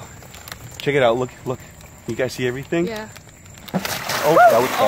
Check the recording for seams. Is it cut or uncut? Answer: uncut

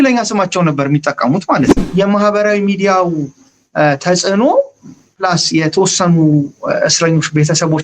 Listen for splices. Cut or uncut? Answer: cut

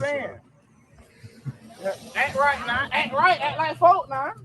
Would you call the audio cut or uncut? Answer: cut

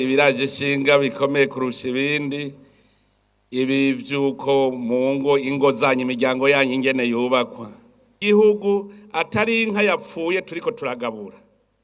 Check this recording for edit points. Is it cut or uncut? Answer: cut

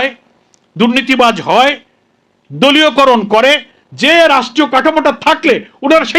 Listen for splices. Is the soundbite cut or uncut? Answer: uncut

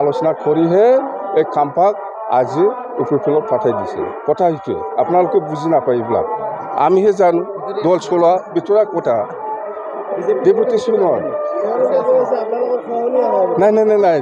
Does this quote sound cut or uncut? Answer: uncut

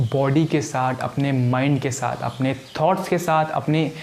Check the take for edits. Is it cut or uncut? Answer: uncut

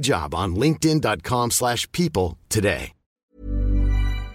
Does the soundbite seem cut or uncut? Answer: cut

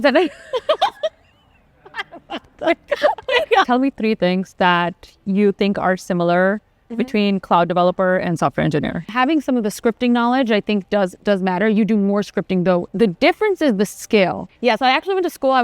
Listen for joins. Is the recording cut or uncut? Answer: cut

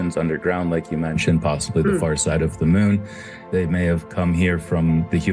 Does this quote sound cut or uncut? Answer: cut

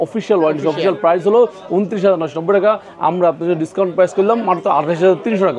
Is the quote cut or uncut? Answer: uncut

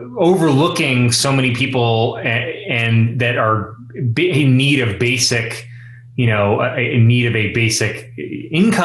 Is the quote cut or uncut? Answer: uncut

